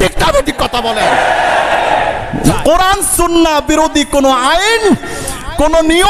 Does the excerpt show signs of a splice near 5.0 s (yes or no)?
no